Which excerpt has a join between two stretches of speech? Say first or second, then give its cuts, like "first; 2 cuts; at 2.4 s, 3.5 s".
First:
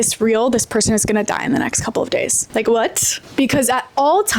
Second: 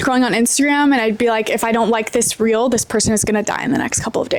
first; 1 cut; at 3.1 s